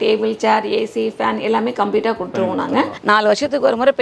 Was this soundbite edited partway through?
yes; 1 cut; at 2.9 s

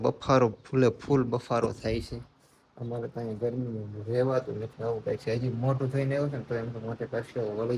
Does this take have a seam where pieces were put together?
no; 0 cuts

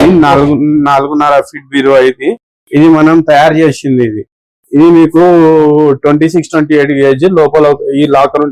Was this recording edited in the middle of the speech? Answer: no; 0 cuts

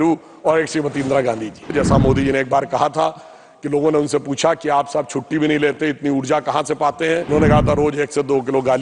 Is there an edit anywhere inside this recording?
yes; 2 cuts; at 1.7 s, 7.3 s

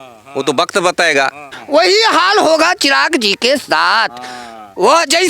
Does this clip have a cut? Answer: yes; 1 cut; at 1.5 s

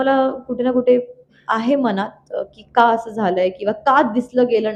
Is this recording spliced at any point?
no; 0 cuts

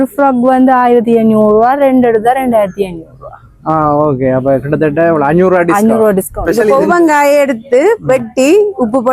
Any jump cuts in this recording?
yes; 1 cut; at 6.4 s

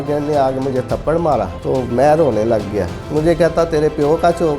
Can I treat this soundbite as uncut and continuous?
no; 2 cuts; at 1.6 s, 3.0 s

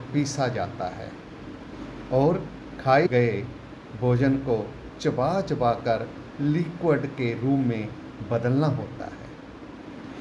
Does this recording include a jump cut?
yes; 1 cut; at 3.1 s

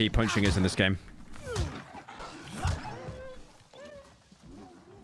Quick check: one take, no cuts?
no; 1 cut; at 2.2 s

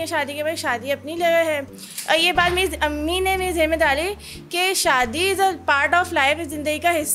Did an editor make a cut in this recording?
no; 0 cuts

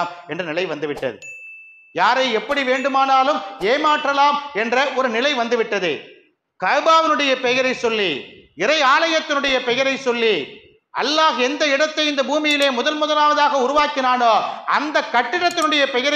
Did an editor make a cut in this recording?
no; 0 cuts

